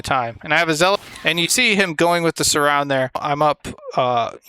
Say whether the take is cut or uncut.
cut